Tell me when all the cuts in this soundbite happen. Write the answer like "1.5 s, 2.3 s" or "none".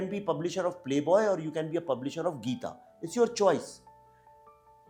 none